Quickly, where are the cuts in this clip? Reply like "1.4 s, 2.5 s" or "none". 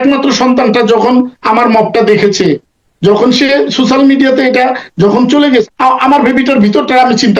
5.7 s